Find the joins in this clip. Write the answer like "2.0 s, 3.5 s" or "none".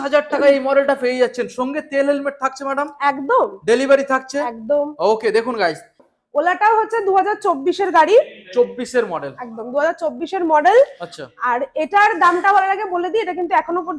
6.0 s